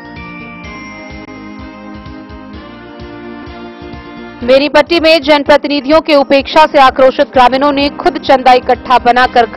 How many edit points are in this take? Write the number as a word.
one